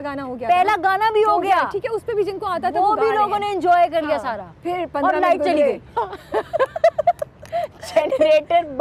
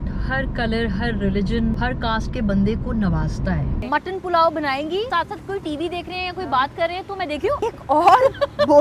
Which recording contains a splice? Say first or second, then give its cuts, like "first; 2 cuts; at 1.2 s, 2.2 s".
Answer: second; 4 cuts; at 1.8 s, 3.8 s, 5.1 s, 7.6 s